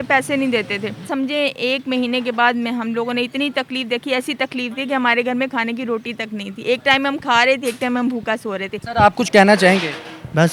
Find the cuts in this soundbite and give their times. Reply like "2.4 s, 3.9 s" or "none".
1.1 s, 8.8 s